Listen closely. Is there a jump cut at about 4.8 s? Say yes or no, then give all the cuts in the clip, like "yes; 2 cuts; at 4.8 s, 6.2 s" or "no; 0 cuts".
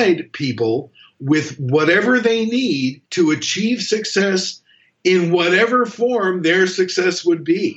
no; 1 cut; at 3.0 s